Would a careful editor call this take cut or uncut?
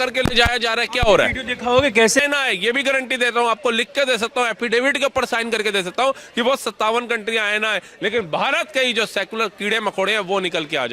cut